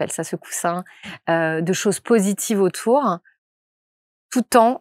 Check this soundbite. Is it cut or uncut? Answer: uncut